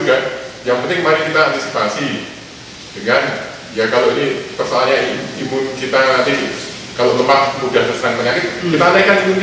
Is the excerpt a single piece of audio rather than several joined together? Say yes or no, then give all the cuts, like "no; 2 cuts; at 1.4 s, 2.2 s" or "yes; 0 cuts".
yes; 0 cuts